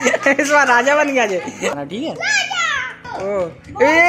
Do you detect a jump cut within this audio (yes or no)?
yes